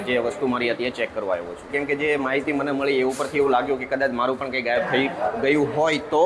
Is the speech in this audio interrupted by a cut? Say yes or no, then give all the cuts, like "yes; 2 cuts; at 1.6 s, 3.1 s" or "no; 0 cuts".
yes; 1 cut; at 1.7 s